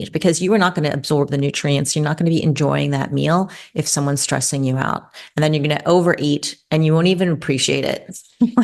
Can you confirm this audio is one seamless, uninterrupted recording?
yes; 0 cuts

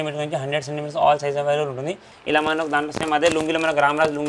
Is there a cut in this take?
yes; 1 cut; at 2.1 s

